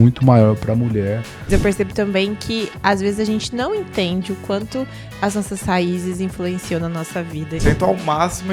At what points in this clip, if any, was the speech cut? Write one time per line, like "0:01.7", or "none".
0:01.5
0:07.6